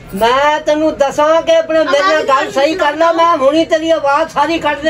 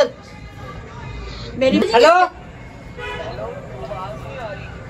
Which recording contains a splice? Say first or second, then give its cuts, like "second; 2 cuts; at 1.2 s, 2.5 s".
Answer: second; 1 cut; at 1.8 s